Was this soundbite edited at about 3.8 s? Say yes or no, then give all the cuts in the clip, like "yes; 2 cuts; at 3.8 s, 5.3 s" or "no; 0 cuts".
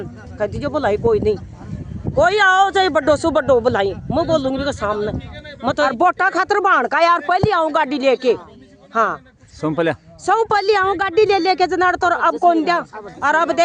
no; 1 cut; at 5.9 s